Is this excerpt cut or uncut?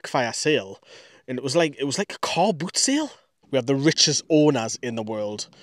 cut